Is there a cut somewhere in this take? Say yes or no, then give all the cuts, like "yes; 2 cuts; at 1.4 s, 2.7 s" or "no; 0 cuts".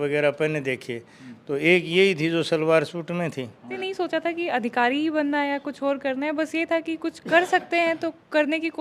yes; 1 cut; at 3.8 s